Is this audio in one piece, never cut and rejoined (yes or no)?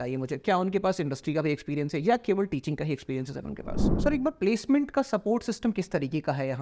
no